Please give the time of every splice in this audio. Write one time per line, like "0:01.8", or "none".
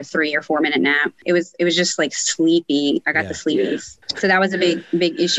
0:01.1
0:04.0